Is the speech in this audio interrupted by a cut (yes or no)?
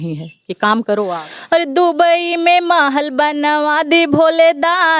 yes